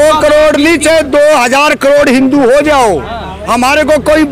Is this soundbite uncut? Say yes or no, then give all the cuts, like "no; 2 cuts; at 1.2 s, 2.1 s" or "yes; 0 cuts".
yes; 0 cuts